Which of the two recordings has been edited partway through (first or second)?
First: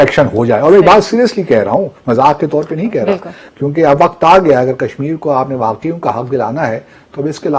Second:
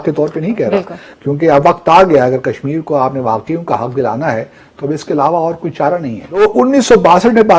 second